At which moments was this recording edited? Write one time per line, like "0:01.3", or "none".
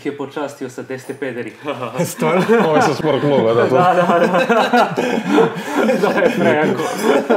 none